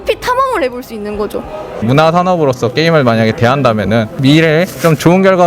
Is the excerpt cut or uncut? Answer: cut